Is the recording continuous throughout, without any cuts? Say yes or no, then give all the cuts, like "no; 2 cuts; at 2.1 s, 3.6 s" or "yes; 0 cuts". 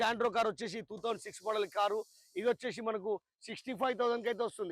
yes; 0 cuts